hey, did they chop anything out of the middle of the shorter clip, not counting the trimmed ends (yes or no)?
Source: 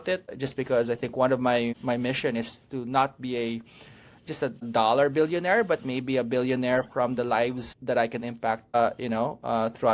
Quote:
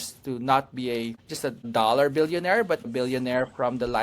yes